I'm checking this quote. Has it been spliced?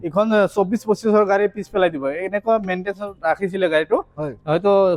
no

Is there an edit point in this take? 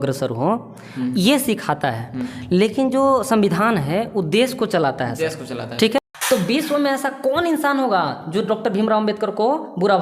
yes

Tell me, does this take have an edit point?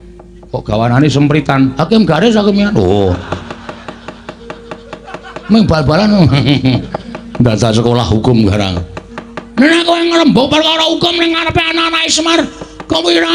no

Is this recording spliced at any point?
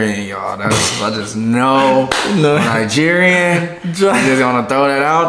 no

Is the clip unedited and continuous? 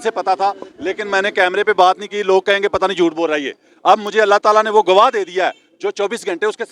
yes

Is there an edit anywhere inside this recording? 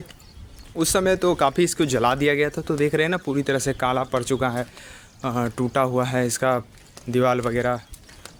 no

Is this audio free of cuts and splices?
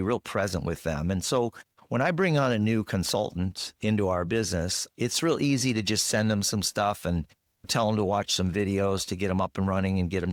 yes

